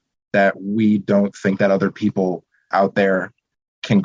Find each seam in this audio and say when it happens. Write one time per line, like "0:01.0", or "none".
0:02.7